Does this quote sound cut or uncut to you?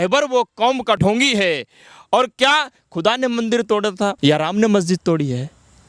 cut